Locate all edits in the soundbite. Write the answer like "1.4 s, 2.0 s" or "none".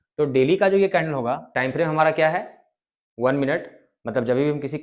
1.5 s